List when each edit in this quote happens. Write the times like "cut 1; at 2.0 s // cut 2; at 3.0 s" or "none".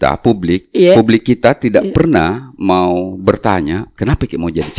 cut 1; at 3.9 s